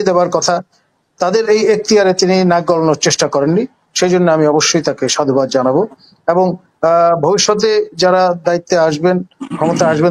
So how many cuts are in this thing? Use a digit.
0